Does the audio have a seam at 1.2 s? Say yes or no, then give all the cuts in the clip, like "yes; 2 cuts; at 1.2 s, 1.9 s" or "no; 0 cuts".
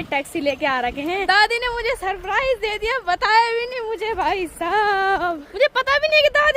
yes; 2 cuts; at 1.2 s, 5.5 s